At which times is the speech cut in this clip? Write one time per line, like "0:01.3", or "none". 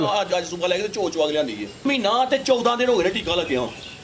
0:01.8